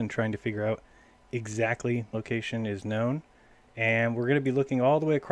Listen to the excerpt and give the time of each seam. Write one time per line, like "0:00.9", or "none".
none